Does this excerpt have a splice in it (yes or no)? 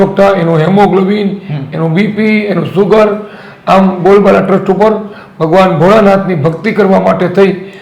no